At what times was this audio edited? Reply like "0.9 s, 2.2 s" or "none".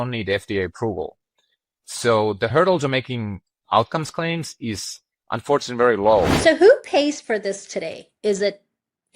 2.5 s, 6.3 s

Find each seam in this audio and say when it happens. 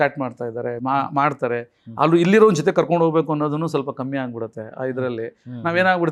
none

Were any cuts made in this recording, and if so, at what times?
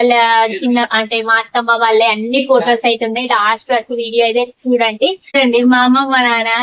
5.3 s

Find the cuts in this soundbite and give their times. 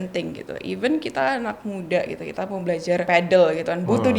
3.1 s

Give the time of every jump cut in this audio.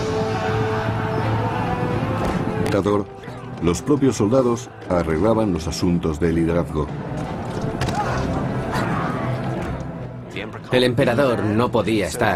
none

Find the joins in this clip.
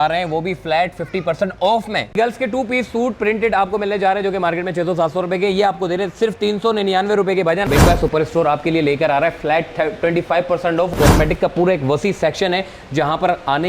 2.2 s, 7.7 s, 10.9 s

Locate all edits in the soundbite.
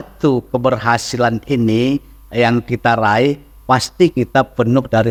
none

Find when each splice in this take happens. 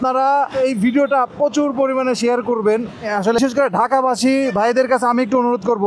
none

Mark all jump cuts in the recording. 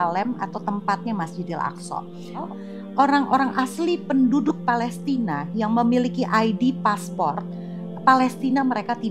2.4 s

